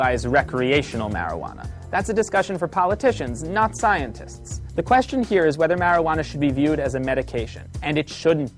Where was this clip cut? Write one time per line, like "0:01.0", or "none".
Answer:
0:05.8